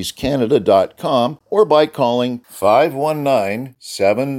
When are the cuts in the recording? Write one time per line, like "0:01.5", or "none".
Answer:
0:01.4